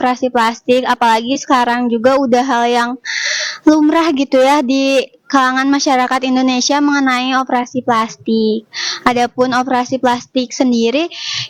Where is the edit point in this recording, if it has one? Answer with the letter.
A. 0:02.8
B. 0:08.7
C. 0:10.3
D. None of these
D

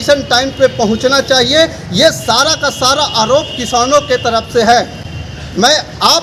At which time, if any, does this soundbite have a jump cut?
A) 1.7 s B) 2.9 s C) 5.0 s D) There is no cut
D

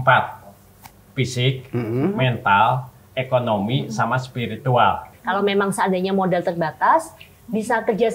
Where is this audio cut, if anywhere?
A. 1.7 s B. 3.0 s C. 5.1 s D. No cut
C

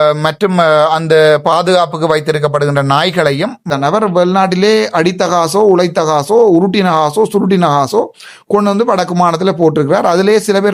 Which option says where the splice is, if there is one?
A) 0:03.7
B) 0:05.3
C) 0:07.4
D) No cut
A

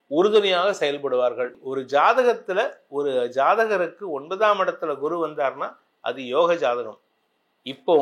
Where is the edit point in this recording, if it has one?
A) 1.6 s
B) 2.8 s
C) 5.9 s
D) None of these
A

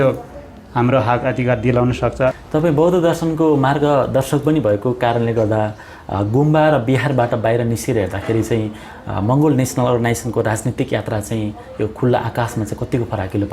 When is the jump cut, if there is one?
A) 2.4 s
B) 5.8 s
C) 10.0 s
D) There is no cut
A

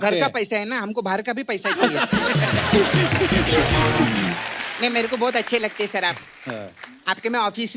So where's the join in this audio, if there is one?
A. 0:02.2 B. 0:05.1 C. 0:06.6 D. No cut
D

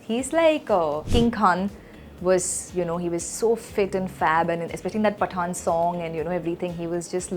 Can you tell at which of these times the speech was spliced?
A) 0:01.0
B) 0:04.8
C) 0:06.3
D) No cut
A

